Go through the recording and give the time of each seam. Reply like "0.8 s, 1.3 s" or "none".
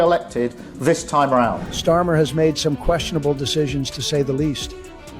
1.7 s